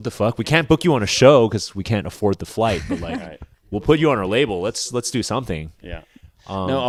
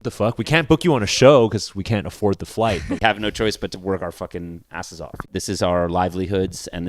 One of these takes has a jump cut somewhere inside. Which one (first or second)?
second